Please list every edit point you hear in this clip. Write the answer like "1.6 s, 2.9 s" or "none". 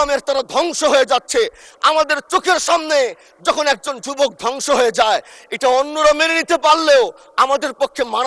none